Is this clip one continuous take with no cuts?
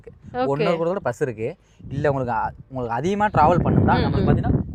yes; 0 cuts

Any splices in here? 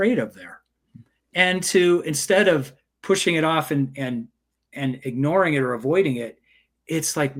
no; 0 cuts

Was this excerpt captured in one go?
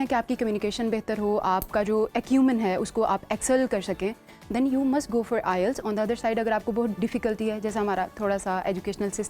yes; 0 cuts

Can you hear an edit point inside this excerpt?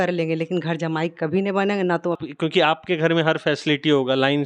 yes; 1 cut; at 2.2 s

